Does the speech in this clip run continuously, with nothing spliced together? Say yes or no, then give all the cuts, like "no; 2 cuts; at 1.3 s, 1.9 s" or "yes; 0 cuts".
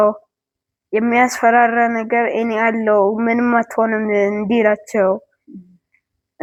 yes; 0 cuts